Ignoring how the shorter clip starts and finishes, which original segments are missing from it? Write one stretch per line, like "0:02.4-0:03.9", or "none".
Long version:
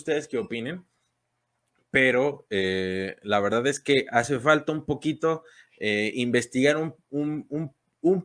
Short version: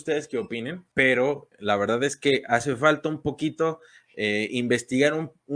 0:00.8-0:01.8
0:02.4-0:03.1

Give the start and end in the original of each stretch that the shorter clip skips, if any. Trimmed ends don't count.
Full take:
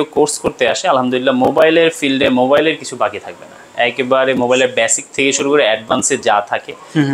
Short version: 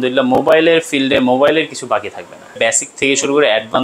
0:03.7-0:04.7

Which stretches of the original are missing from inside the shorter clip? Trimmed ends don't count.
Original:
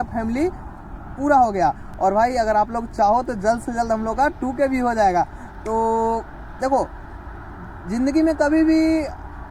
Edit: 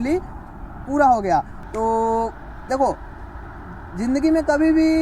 0:01.9-0:05.5

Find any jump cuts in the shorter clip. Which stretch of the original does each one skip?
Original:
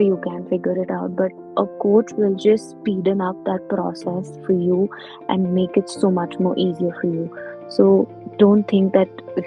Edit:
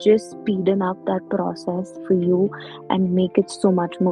none

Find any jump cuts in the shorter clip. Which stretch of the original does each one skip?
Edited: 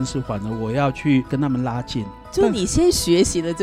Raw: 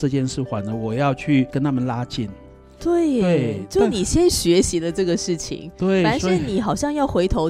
0:02.5-0:03.6

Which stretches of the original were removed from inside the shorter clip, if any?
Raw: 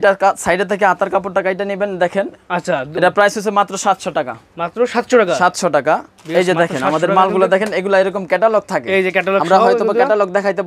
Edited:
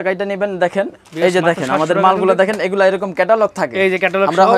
0:02.4-0:06.1

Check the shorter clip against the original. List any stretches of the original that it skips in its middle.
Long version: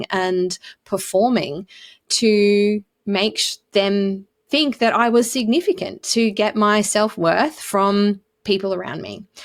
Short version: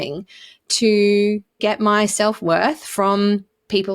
0:03.0-0:06.3

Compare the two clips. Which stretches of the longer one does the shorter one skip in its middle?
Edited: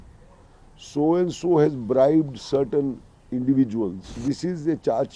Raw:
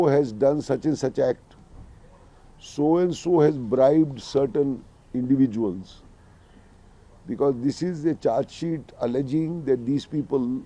0:06.0-0:07.6

